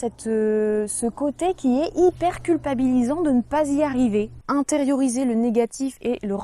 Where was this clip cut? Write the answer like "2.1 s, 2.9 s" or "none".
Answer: 4.4 s